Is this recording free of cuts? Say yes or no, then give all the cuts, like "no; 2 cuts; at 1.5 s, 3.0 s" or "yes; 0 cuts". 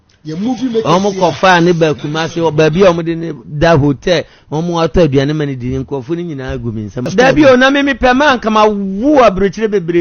no; 1 cut; at 7.0 s